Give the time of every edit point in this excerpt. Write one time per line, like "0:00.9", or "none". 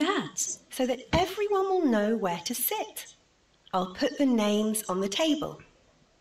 0:01.0
0:05.0